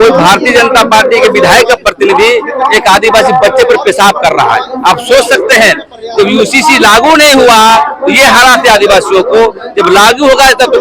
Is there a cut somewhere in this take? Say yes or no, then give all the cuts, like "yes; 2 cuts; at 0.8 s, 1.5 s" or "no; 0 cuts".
no; 0 cuts